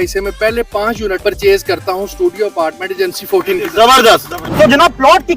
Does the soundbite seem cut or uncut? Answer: cut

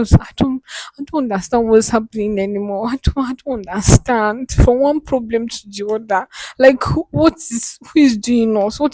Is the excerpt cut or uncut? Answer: uncut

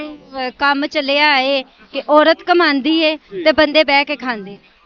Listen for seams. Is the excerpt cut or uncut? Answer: uncut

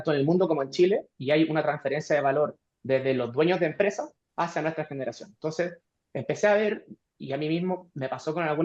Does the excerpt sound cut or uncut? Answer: cut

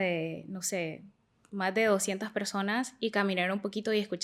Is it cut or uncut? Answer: uncut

